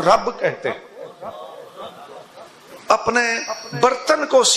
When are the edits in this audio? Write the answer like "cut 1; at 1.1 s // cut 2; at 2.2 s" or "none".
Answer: cut 1; at 2.6 s